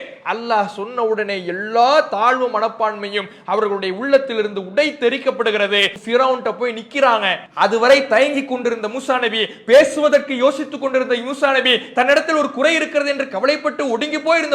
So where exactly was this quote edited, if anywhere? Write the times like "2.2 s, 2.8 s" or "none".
6.0 s, 7.4 s